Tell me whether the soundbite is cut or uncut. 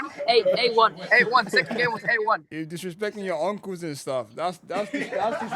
cut